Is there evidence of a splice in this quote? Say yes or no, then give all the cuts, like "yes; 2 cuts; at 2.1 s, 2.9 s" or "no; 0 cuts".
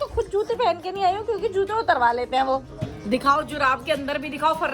no; 0 cuts